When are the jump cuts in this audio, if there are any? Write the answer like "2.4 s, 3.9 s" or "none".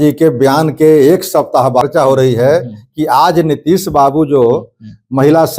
1.8 s